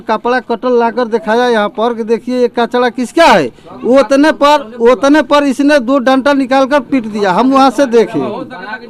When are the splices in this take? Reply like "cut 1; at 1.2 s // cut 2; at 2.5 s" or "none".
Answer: none